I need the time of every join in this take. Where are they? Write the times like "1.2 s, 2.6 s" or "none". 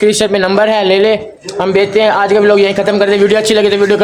none